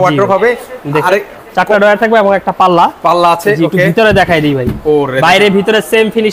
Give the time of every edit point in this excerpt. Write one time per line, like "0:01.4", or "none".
none